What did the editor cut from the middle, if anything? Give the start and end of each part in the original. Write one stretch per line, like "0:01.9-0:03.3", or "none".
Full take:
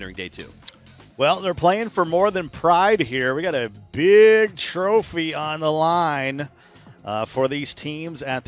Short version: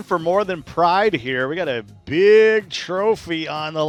none